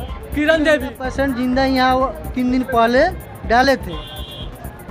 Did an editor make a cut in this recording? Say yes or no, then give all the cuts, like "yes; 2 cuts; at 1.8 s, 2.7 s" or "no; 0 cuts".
yes; 1 cut; at 1.0 s